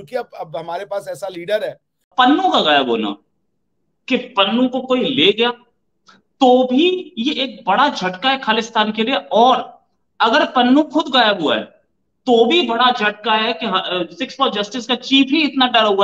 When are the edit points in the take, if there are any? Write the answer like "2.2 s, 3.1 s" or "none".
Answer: 2.1 s